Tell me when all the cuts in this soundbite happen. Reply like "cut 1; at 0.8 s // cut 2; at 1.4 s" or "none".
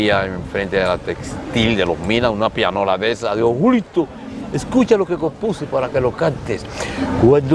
none